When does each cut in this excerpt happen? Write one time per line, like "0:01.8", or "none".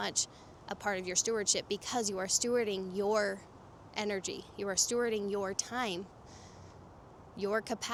none